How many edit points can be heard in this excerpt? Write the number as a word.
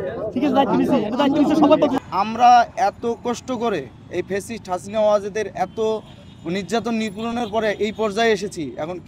one